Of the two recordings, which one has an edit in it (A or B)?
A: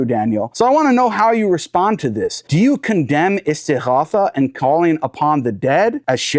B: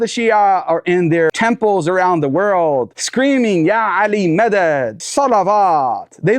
B